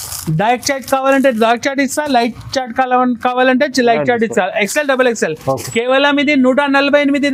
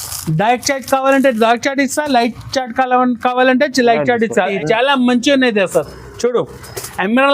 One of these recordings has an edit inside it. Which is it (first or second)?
second